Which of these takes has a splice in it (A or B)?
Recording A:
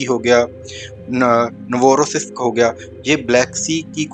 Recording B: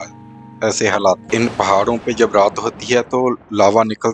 B